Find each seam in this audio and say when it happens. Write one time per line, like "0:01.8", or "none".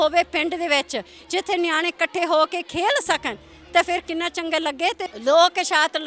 0:05.0